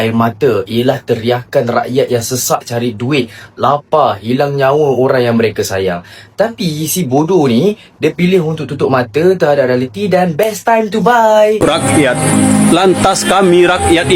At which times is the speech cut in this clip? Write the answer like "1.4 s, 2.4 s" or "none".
11.6 s